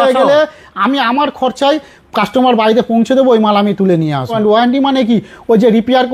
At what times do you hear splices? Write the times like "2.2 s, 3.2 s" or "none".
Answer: 4.4 s